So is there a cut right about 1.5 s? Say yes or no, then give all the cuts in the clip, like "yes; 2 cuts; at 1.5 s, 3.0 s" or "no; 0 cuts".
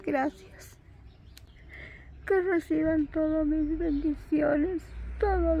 yes; 1 cut; at 1.5 s